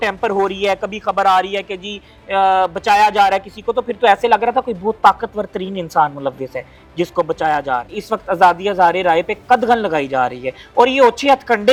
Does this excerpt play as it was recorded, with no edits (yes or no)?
yes